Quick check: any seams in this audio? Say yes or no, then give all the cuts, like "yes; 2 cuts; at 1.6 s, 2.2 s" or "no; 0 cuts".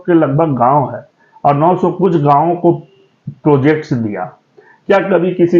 no; 0 cuts